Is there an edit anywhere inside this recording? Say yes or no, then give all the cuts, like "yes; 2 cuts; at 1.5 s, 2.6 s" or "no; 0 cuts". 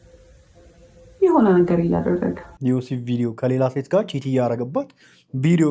yes; 1 cut; at 2.5 s